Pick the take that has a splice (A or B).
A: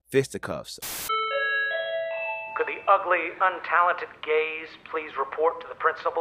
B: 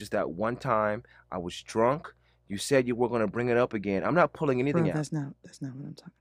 A